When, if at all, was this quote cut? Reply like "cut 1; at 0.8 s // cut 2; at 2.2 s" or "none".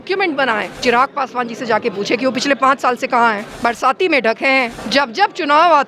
cut 1; at 0.8 s // cut 2; at 3.5 s // cut 3; at 4.8 s